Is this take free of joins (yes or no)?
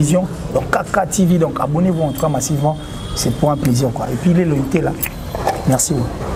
yes